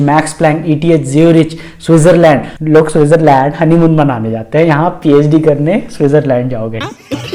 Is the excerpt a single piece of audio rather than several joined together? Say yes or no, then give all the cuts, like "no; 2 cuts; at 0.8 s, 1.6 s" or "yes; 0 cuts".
yes; 0 cuts